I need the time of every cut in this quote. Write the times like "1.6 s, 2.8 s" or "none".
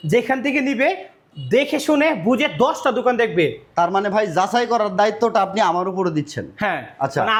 none